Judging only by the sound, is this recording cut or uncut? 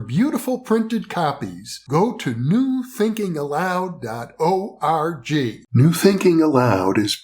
cut